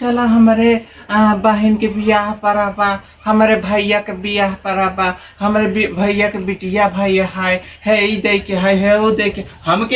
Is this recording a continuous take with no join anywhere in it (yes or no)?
yes